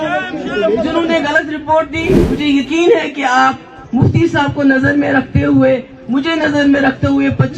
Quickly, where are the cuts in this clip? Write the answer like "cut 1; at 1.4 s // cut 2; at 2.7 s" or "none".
cut 1; at 2.3 s